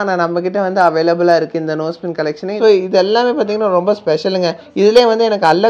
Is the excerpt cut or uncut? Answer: cut